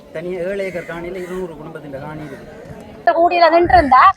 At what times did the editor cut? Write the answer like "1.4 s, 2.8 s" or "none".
3.1 s